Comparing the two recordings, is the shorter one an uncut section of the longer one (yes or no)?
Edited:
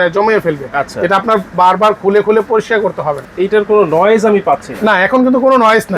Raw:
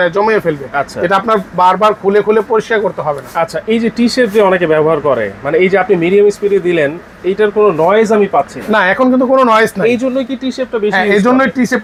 no